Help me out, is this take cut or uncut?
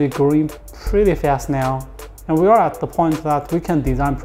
uncut